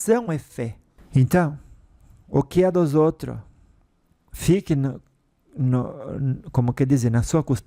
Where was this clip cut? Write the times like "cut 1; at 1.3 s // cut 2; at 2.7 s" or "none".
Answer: cut 1; at 0.9 s